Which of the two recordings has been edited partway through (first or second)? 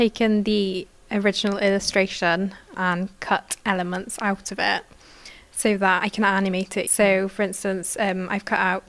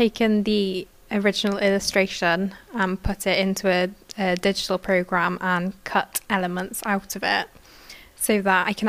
first